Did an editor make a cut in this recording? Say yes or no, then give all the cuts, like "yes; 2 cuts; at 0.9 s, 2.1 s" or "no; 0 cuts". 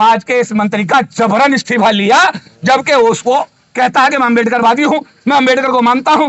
no; 0 cuts